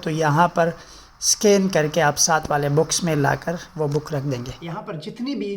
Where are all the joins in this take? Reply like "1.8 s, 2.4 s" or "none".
4.6 s